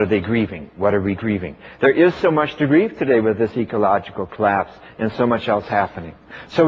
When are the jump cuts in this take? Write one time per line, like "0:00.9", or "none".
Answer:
none